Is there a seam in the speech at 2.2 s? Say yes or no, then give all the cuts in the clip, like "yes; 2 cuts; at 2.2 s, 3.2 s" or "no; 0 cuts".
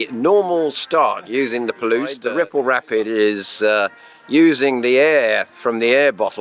yes; 1 cut; at 2.2 s